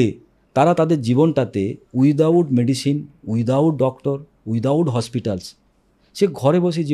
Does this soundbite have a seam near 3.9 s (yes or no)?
no